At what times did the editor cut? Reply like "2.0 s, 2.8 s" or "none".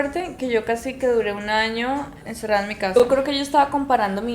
2.9 s